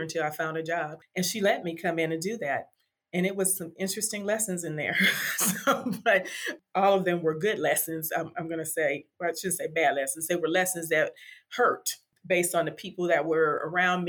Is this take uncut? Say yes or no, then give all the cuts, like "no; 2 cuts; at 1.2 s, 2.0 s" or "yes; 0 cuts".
yes; 0 cuts